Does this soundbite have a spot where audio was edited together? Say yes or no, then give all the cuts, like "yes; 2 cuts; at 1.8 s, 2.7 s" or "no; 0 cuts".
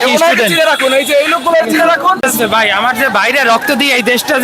yes; 1 cut; at 2.2 s